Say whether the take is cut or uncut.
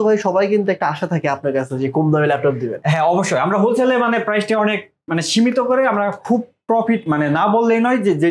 uncut